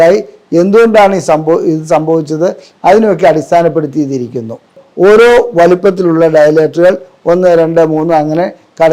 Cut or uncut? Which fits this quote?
cut